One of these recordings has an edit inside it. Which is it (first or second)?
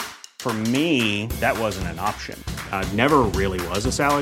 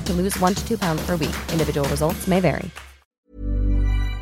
second